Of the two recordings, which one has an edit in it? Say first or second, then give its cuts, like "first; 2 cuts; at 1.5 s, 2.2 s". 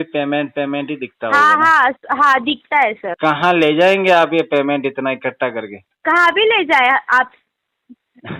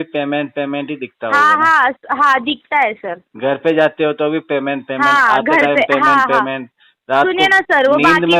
first; 2 cuts; at 3.1 s, 5.8 s